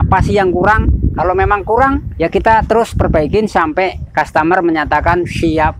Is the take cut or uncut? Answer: uncut